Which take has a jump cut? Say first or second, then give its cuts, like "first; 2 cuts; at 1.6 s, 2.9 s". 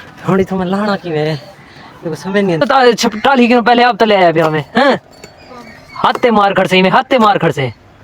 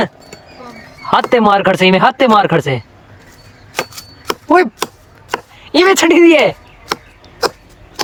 first; 1 cut; at 2.6 s